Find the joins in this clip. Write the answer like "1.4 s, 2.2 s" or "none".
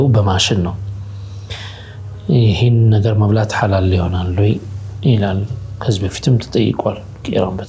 none

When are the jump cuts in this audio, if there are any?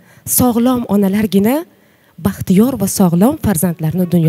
none

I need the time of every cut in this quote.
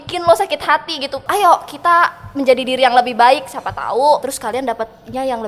1.3 s, 4.3 s

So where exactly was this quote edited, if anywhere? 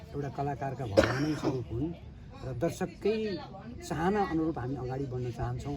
none

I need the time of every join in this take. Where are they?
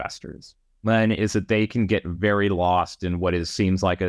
none

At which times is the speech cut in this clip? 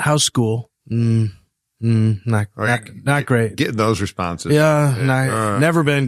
none

